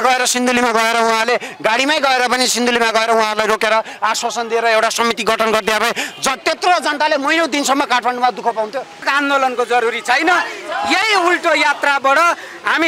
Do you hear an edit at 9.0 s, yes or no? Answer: yes